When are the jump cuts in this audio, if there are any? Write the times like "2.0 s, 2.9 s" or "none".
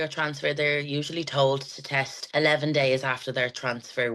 2.2 s